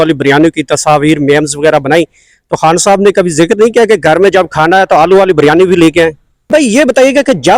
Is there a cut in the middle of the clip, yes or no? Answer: yes